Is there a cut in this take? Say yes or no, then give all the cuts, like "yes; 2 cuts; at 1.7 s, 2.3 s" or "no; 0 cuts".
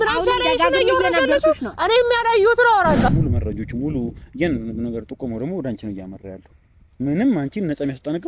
yes; 1 cut; at 3.1 s